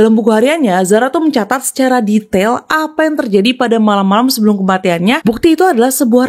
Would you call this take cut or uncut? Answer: cut